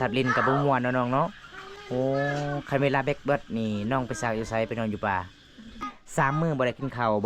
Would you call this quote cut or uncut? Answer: cut